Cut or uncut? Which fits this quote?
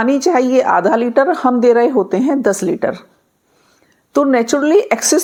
uncut